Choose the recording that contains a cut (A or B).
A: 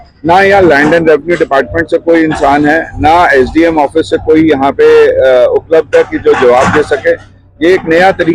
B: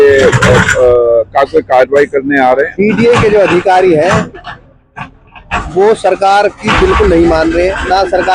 B